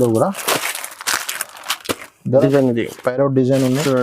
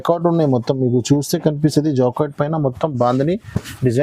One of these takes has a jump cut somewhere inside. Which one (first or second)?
first